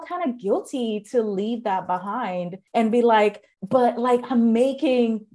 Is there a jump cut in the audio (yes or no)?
yes